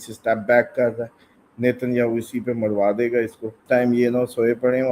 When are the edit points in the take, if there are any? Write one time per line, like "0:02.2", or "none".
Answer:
0:03.5